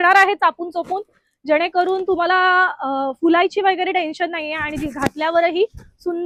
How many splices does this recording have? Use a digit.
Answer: 0